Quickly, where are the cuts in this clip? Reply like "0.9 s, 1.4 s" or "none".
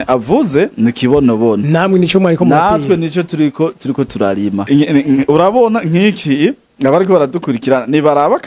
4.6 s